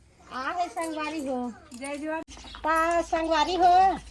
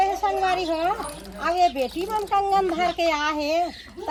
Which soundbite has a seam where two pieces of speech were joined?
first; 1 cut; at 2.3 s

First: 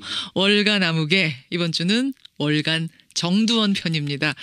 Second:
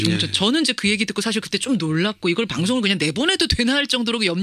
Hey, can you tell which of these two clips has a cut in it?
second; 1 cut; at 3.4 s

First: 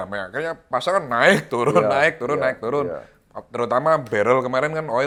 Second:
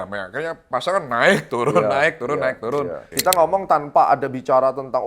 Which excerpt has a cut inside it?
second; 1 cut; at 3.0 s

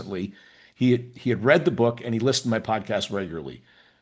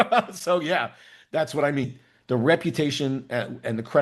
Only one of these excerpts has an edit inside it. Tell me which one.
second; 1 cut; at 1.9 s

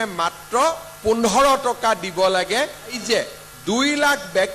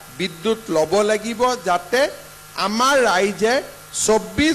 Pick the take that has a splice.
first; 1 cut; at 3.0 s

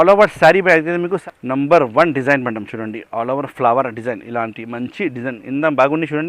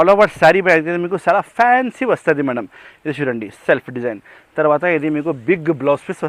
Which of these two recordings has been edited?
first; 1 cut; at 1.1 s

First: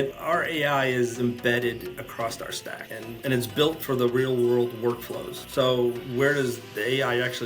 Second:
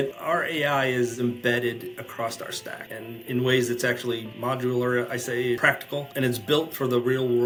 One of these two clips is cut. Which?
first; 1 cut; at 3.2 s

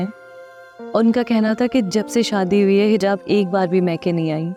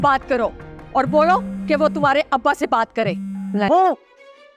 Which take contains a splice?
second; 1 cut; at 3.7 s

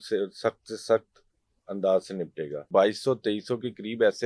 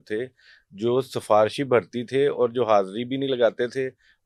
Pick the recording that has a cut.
first; 1 cut; at 2.7 s

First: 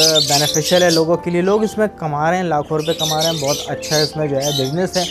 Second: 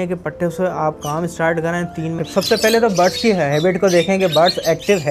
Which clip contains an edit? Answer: second; 1 cut; at 2.2 s

